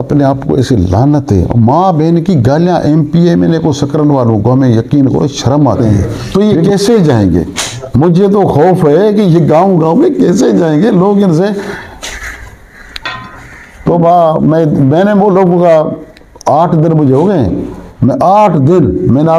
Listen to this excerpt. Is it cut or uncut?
cut